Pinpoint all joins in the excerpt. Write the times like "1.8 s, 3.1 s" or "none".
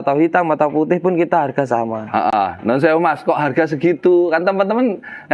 none